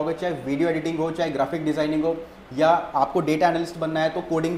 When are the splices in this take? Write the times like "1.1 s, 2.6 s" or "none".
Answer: none

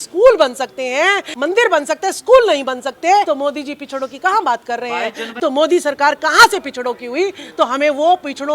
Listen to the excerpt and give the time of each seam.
1.3 s, 3.3 s, 5.3 s

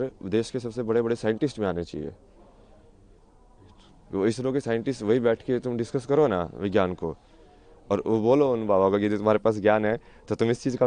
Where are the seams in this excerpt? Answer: none

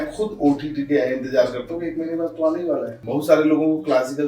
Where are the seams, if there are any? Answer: 3.0 s

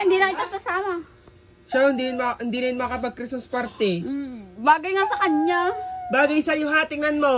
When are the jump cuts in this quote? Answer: none

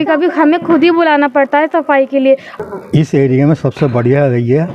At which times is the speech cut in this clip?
2.5 s

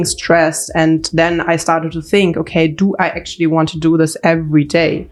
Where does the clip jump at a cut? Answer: none

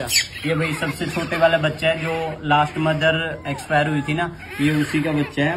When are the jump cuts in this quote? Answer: none

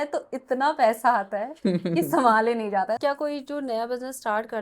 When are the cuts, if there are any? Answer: 3.0 s

